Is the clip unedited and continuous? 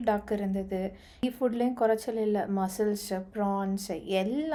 yes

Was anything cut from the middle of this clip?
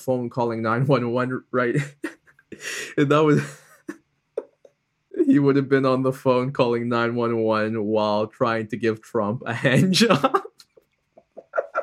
yes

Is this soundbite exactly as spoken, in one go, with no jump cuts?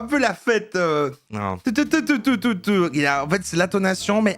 yes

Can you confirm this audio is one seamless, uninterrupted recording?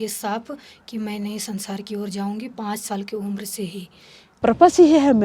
no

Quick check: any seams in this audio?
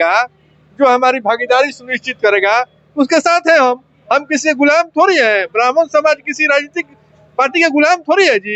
no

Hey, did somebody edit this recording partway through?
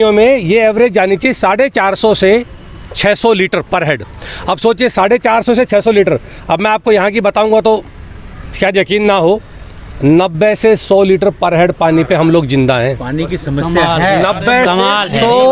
no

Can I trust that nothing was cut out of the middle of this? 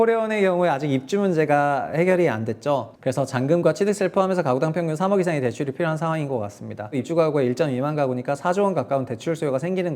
no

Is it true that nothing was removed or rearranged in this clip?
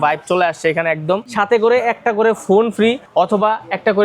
no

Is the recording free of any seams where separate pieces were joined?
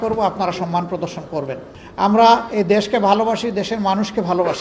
no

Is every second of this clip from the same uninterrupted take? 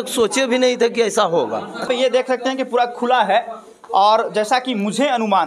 no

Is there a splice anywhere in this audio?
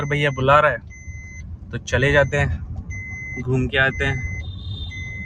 no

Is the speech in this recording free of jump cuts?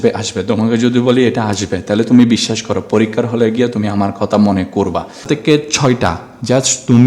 no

